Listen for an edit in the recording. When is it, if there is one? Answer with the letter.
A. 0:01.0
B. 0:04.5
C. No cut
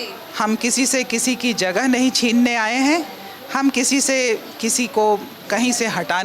C